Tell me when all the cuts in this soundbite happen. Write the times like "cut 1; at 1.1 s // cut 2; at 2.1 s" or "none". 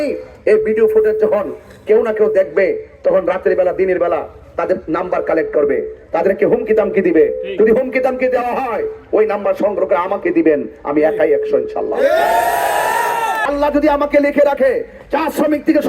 cut 1; at 13.4 s